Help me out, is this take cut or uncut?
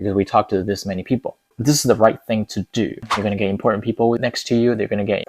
cut